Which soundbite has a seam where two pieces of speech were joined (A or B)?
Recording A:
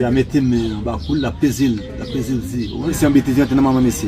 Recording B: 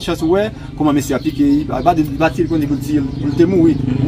A